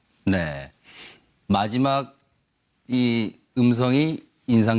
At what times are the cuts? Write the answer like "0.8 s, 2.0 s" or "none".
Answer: 2.6 s